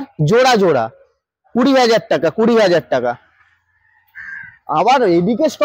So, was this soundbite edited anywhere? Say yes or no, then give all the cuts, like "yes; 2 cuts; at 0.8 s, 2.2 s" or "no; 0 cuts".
no; 0 cuts